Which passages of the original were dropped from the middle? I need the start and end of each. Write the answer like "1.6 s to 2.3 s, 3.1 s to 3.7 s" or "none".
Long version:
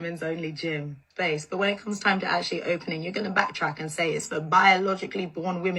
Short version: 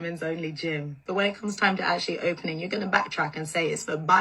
1.0 s to 1.5 s